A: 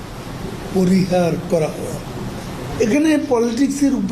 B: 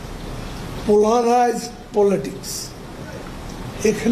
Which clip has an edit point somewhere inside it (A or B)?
A